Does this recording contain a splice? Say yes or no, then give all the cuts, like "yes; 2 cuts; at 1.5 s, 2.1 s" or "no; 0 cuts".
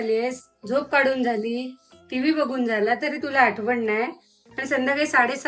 no; 0 cuts